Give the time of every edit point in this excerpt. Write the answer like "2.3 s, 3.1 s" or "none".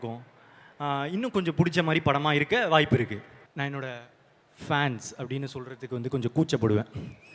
3.4 s